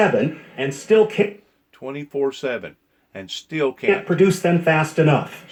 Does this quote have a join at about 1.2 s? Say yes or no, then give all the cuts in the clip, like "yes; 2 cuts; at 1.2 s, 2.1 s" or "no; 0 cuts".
no; 0 cuts